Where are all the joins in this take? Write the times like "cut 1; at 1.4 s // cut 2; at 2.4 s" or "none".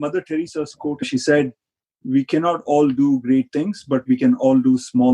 cut 1; at 1.0 s